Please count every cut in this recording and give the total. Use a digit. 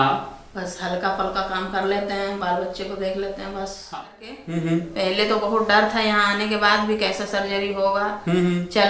1